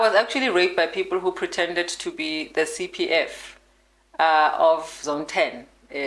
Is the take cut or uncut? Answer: uncut